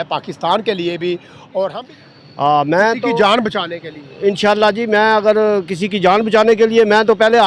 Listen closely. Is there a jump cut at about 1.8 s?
yes; 1 cut; at 1.8 s

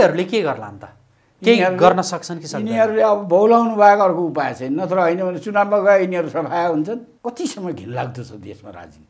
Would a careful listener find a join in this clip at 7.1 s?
yes; 1 cut; at 7.1 s

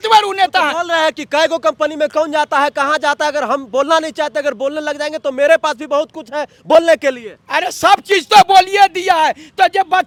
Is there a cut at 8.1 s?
no; 0 cuts

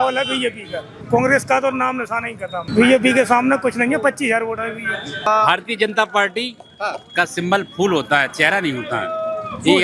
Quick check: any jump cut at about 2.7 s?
yes; 3 cuts; at 1.0 s, 2.7 s, 5.3 s

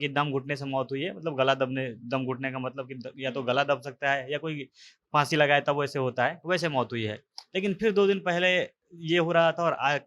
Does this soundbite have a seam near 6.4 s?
no; 0 cuts

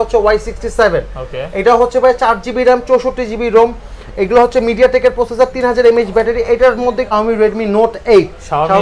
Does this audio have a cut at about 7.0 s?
yes; 1 cut; at 7.0 s

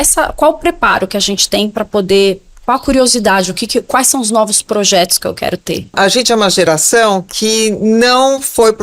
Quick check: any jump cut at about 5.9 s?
yes; 1 cut; at 5.9 s

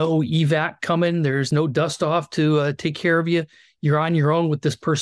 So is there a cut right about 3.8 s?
no; 1 cut; at 1.5 s

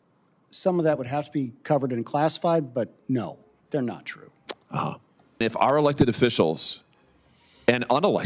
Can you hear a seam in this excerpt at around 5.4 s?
yes; 1 cut; at 5.4 s

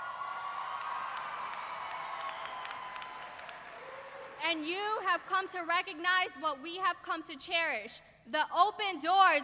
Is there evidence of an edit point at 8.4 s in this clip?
yes; 1 cut; at 8.4 s

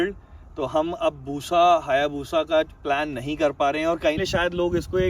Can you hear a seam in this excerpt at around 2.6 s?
no; 1 cut; at 4.2 s

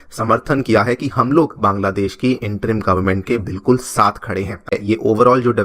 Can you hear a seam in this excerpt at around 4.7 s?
yes; 1 cut; at 4.7 s

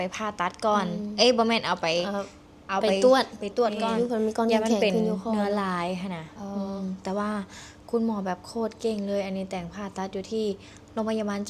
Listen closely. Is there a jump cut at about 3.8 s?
yes; 1 cut; at 3.8 s

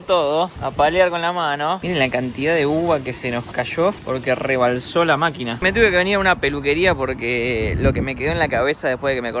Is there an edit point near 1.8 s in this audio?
yes; 2 cuts; at 1.8 s, 5.6 s

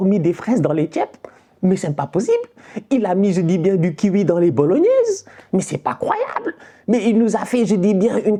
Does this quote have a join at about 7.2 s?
no; 0 cuts

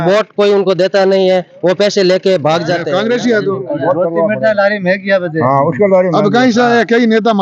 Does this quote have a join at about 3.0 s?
yes; 1 cut; at 3.0 s

